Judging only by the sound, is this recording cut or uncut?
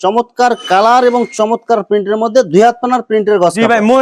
uncut